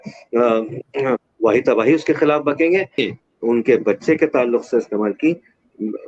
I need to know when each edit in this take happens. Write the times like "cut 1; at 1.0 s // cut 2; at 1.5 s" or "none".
cut 1; at 3.0 s